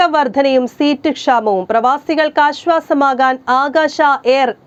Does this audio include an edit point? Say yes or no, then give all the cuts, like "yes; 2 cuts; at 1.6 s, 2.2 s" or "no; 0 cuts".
no; 0 cuts